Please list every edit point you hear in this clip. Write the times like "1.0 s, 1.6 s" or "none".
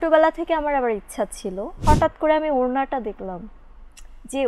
1.8 s